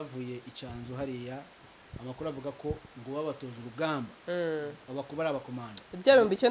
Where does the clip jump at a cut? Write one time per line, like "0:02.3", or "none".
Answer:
none